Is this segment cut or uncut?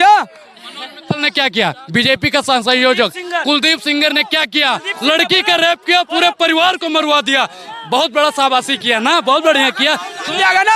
uncut